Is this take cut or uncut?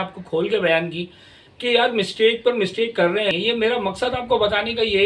cut